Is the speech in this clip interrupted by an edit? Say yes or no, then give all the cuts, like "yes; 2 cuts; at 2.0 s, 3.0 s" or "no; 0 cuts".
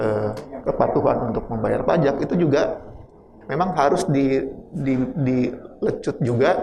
no; 0 cuts